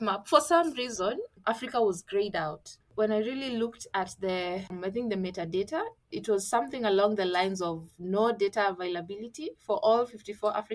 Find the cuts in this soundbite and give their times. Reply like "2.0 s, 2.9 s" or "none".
1.3 s, 2.9 s, 4.8 s, 6.1 s